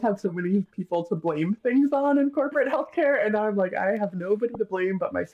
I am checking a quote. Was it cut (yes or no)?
no